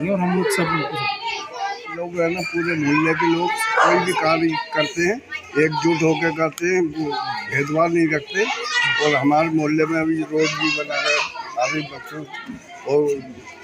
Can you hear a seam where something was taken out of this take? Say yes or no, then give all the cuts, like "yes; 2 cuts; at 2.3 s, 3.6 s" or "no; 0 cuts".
yes; 1 cut; at 2.0 s